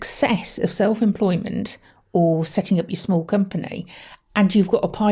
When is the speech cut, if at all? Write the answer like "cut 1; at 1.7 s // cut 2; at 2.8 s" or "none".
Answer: none